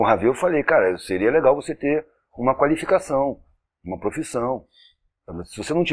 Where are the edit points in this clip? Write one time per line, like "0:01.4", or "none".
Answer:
none